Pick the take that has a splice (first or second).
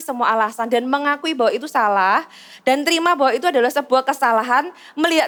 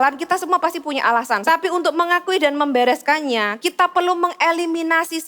second